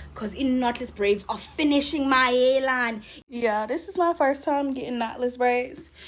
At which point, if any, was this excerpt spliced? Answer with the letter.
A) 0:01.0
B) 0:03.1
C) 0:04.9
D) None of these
B